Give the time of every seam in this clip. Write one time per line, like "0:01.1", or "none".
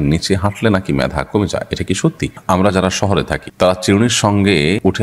0:02.4